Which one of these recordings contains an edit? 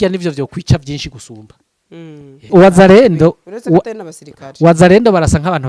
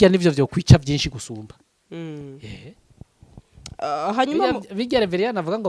first; 1 cut; at 2.5 s

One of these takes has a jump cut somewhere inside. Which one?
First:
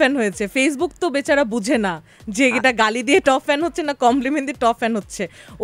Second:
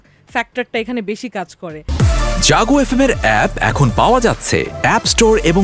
second; 1 cut; at 1.8 s

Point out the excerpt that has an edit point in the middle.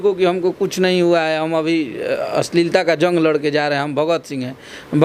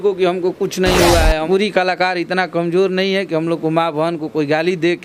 second; 1 cut; at 1.4 s

